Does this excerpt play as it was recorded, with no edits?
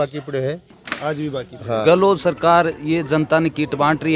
no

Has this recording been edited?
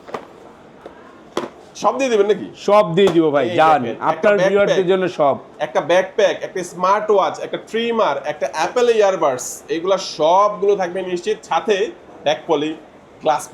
no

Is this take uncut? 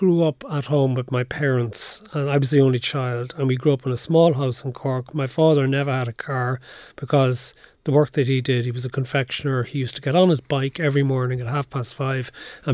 yes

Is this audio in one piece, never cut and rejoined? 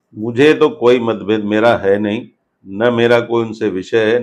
yes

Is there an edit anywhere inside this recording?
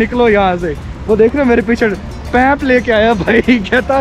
no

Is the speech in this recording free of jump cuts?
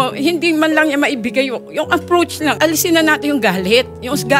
no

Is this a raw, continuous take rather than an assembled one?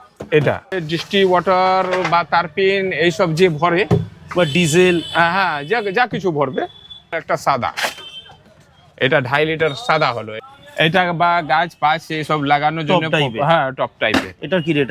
no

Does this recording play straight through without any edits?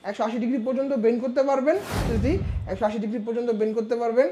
no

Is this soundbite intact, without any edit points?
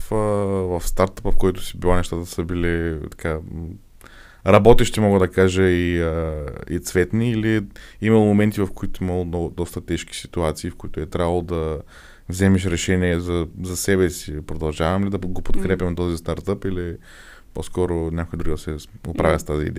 yes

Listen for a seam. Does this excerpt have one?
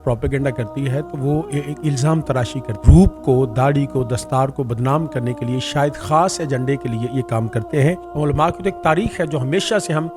yes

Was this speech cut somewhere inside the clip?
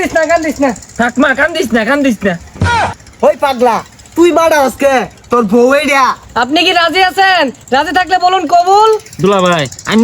yes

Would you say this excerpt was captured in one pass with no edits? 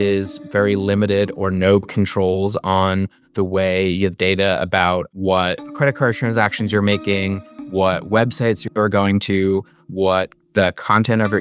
yes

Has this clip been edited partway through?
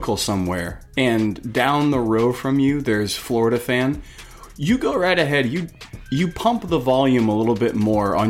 no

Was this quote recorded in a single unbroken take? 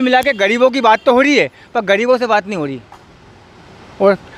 yes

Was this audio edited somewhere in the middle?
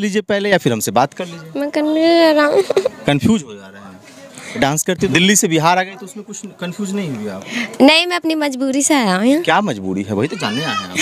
no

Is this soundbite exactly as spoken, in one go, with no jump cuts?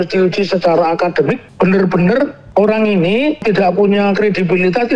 no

